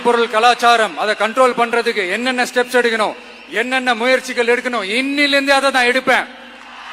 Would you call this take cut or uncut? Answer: uncut